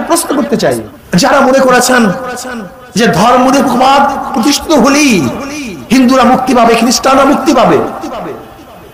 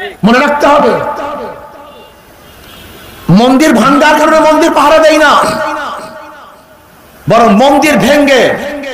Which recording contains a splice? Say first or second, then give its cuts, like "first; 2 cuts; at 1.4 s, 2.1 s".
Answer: first; 1 cut; at 0.9 s